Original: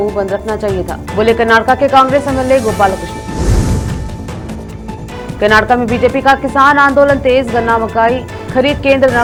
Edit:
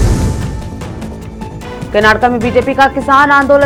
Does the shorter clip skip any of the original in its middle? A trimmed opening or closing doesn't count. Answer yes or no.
no